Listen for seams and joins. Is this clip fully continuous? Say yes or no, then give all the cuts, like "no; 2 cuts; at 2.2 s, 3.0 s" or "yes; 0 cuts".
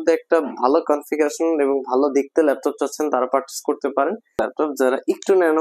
no; 1 cut; at 4.4 s